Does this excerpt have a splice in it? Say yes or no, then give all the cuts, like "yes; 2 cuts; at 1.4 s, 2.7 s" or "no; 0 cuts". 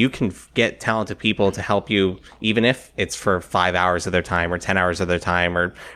no; 0 cuts